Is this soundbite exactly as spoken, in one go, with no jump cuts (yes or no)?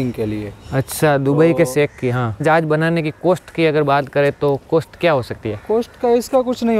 no